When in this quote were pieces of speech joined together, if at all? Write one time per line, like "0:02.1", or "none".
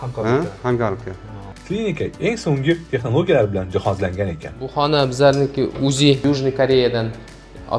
0:01.5
0:06.2